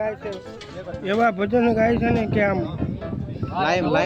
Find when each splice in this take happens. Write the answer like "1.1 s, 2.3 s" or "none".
none